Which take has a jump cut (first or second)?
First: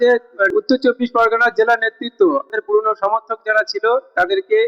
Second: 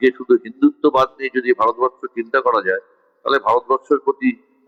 first